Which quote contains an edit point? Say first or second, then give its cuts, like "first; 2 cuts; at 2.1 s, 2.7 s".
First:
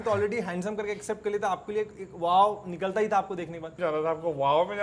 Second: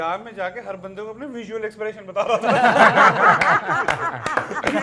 first; 1 cut; at 3.7 s